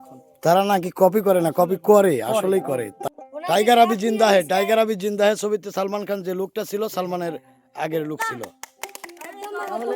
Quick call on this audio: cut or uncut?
cut